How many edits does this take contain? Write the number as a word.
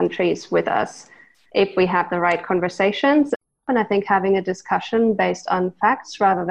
one